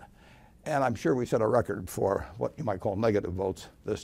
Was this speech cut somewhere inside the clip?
yes; 1 cut; at 1.1 s

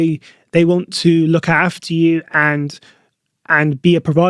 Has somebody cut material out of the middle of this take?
no; 0 cuts

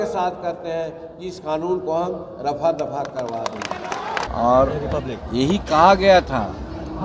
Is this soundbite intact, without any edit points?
no; 1 cut; at 4.3 s

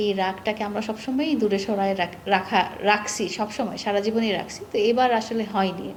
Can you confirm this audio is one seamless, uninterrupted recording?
yes; 0 cuts

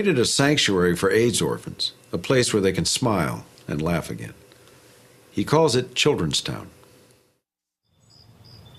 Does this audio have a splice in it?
no; 0 cuts

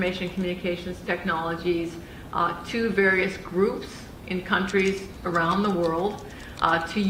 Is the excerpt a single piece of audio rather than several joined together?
yes; 0 cuts

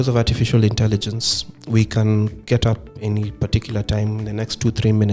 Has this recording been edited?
no; 0 cuts

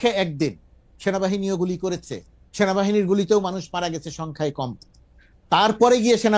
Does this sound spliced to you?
no; 0 cuts

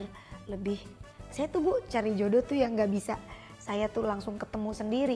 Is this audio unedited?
no; 1 cut; at 1.3 s

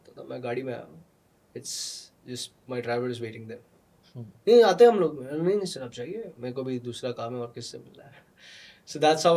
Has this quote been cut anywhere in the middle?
no; 0 cuts

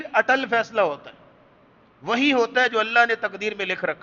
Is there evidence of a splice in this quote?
no; 0 cuts

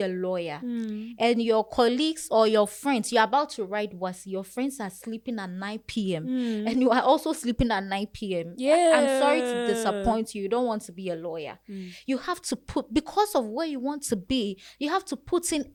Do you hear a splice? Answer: no; 0 cuts

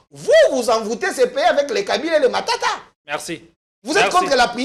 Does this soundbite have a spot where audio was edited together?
no; 0 cuts

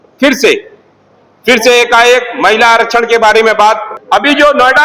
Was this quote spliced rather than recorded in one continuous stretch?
yes; 1 cut; at 3.9 s

